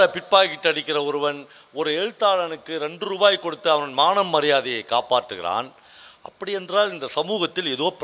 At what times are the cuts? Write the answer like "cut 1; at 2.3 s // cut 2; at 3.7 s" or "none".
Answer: none

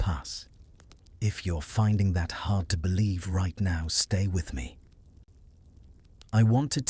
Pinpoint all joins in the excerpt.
cut 1; at 4.8 s // cut 2; at 6.2 s

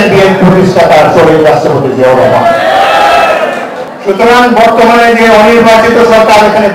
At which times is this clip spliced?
cut 1; at 3.9 s

